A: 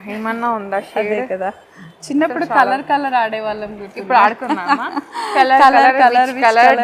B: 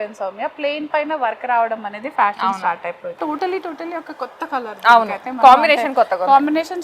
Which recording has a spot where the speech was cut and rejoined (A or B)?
B